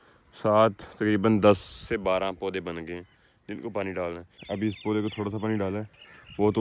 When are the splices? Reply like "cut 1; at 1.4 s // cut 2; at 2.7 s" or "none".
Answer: cut 1; at 4.3 s